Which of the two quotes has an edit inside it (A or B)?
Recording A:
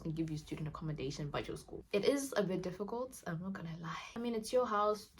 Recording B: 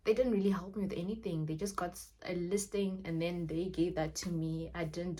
A